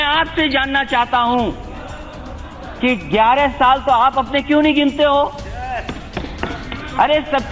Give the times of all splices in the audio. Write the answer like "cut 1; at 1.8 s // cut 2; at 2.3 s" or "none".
none